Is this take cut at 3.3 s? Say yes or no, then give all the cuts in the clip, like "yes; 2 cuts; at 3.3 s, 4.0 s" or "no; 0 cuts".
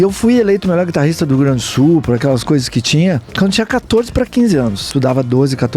yes; 2 cuts; at 3.3 s, 4.8 s